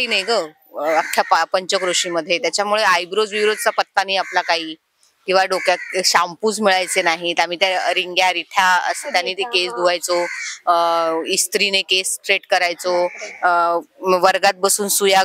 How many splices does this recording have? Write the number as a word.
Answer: zero